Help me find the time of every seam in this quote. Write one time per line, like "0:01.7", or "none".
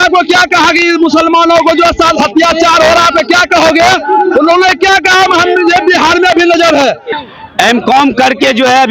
0:07.0